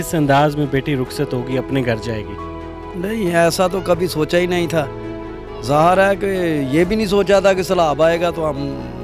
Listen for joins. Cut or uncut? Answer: uncut